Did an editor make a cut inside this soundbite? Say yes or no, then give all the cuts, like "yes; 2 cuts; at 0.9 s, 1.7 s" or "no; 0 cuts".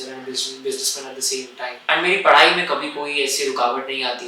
yes; 1 cut; at 1.8 s